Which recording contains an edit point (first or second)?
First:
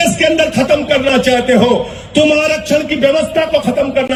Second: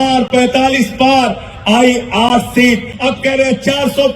second